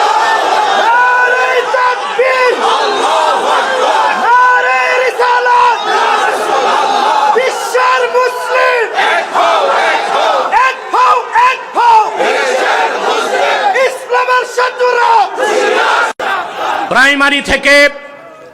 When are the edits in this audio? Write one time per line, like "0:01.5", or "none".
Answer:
0:16.9